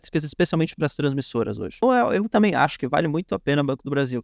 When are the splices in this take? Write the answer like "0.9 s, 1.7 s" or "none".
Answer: 1.8 s